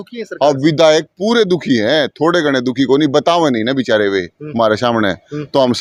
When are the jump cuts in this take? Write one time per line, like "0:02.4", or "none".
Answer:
none